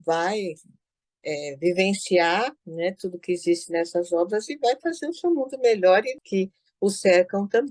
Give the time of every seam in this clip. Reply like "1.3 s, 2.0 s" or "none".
6.2 s